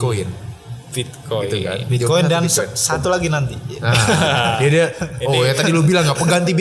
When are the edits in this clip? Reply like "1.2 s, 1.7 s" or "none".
none

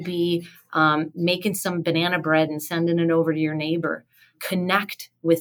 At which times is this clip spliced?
4.4 s

